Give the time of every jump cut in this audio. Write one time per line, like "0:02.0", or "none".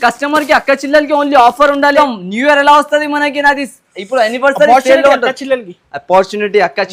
0:01.9